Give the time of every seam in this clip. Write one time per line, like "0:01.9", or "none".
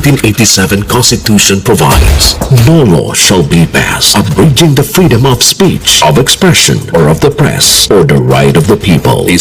none